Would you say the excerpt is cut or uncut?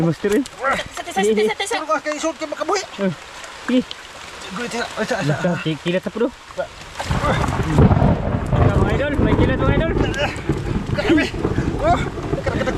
uncut